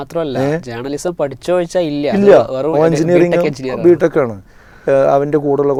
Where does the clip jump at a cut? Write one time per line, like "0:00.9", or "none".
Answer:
none

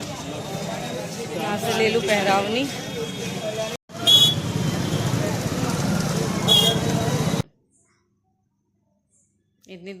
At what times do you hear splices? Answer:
0:07.4

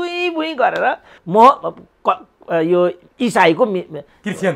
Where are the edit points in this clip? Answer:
0:01.2

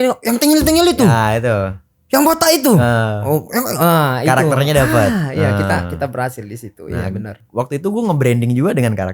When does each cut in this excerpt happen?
none

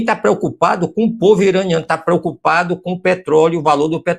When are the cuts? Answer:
none

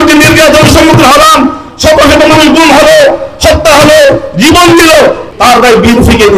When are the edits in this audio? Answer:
0:05.3

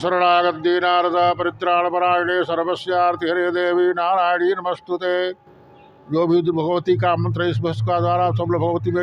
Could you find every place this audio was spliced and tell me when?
none

